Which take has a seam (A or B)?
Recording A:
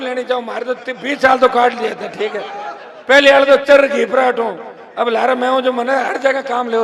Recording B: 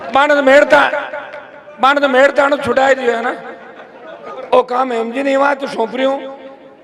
B